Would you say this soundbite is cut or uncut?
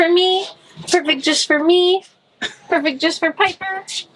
uncut